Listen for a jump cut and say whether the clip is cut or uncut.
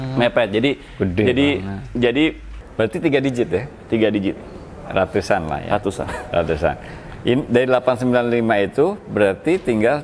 cut